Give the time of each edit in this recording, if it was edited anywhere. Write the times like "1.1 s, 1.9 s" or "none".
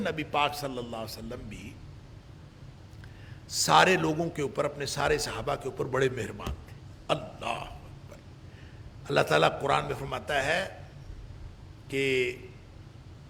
none

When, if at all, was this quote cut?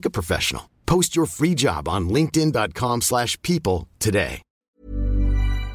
4.5 s

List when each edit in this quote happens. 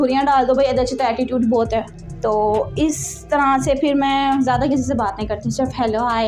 2.0 s

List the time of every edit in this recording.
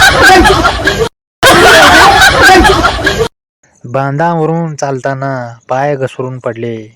1.4 s, 3.4 s

